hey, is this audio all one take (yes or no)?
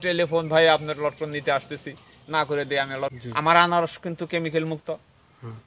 no